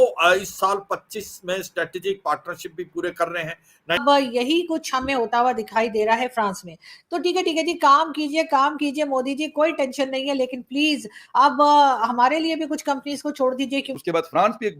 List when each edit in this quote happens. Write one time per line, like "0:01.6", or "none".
0:04.0
0:14.0